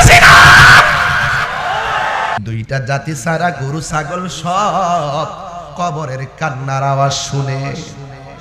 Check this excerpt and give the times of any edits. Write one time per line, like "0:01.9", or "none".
0:02.4

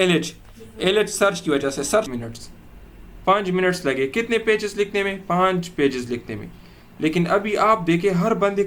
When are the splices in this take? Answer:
0:02.1

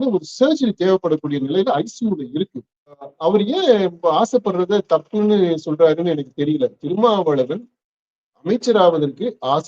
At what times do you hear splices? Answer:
0:03.1

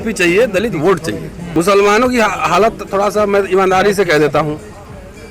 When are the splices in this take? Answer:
0:01.3

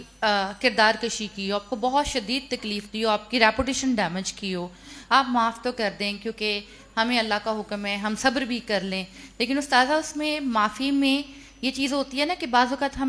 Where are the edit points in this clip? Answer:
none

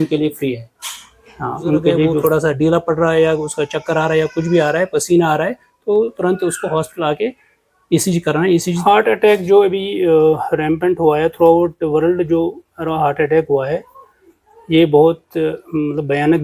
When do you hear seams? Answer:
0:02.2
0:08.6

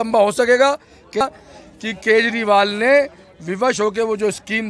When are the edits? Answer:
0:01.2

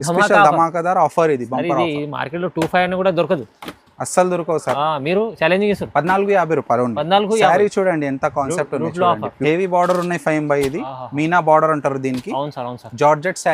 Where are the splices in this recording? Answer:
0:09.4

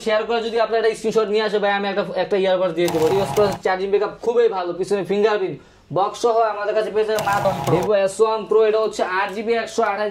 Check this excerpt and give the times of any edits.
0:03.1
0:07.4

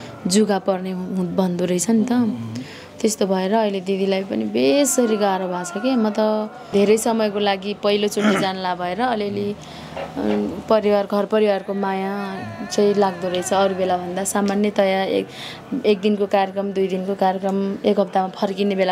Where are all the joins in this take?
0:06.7

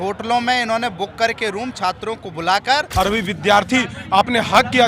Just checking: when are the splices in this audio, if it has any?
0:02.9

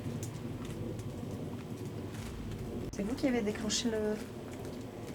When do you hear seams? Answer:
0:02.9

